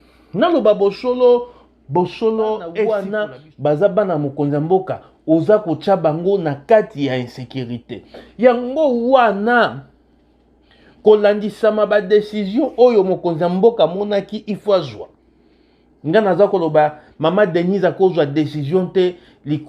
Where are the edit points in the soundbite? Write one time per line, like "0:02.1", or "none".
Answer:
0:02.9